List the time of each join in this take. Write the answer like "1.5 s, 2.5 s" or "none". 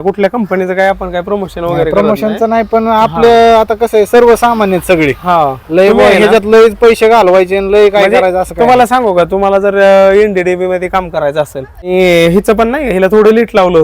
11.9 s

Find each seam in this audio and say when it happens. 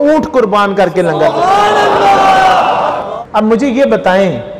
3.1 s

